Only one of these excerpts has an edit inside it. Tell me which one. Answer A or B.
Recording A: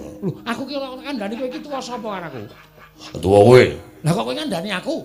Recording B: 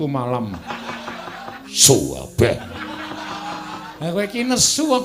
B